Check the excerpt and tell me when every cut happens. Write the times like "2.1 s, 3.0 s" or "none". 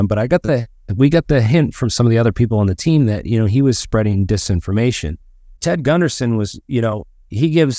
5.5 s

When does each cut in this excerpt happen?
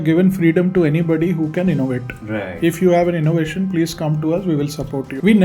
none

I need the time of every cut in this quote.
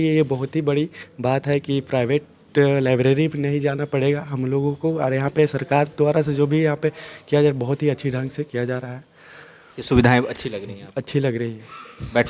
none

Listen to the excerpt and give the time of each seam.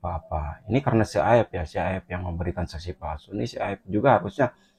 none

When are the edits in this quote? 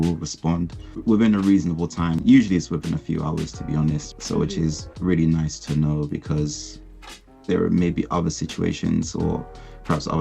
1.0 s, 2.2 s, 4.1 s

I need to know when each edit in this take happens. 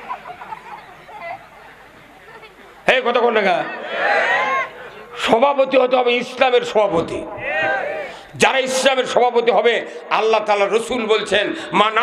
none

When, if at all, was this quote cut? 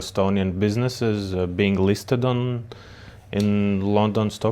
none

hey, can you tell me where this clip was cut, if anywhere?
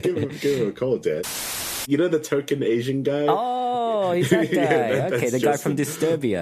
1.6 s

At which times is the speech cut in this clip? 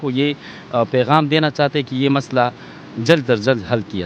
none

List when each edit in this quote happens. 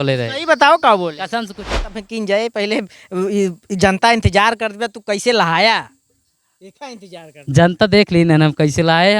1.8 s

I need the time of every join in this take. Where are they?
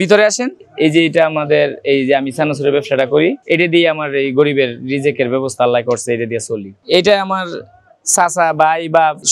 none

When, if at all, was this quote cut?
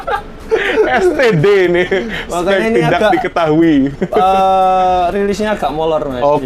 none

